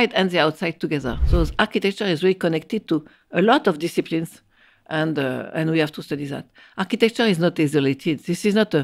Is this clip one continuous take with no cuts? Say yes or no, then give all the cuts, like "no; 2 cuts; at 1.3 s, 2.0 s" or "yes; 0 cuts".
no; 1 cut; at 1.2 s